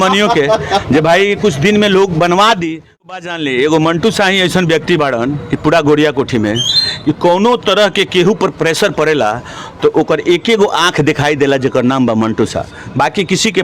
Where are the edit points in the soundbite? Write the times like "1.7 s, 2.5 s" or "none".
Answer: 3.1 s